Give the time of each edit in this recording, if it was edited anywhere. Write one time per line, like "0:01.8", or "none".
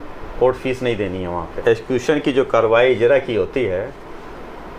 0:01.5

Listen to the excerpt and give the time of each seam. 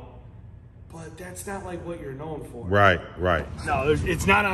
0:03.5

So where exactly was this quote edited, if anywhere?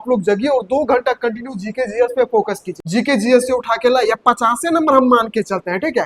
0:02.7

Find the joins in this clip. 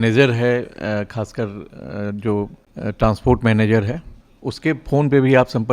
0:02.6

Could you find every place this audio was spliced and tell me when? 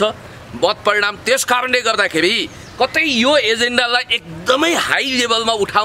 none

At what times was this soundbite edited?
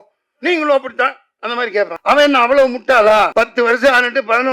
0:02.0
0:03.3

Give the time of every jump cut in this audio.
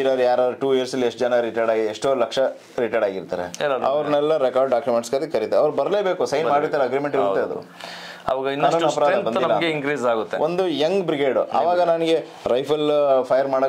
none

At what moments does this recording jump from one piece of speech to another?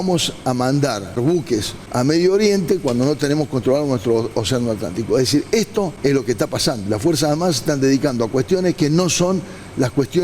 0:01.3
0:05.9

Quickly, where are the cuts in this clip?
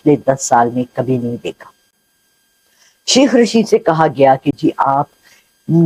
none

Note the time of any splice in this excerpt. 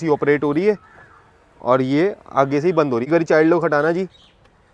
0:03.1

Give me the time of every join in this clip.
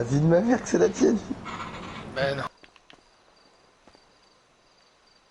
0:02.6

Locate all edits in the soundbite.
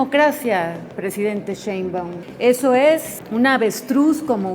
0:02.2
0:03.2

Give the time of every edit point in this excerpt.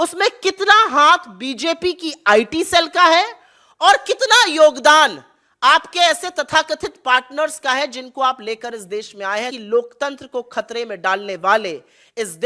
0:09.5

